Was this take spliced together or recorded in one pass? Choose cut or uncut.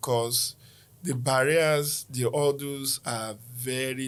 uncut